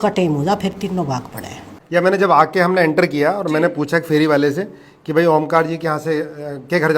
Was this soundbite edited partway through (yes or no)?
yes